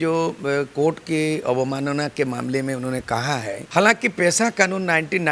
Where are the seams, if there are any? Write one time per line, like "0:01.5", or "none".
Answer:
0:03.6